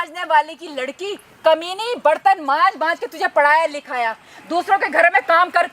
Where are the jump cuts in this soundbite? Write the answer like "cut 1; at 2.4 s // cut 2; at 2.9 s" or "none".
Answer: none